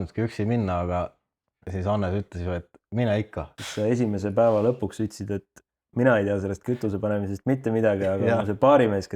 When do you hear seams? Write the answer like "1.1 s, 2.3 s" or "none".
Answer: 3.5 s